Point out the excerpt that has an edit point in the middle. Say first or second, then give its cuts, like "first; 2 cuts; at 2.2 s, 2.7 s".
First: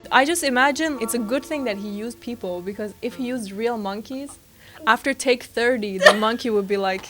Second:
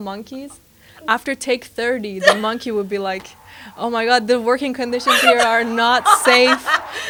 first; 1 cut; at 1.0 s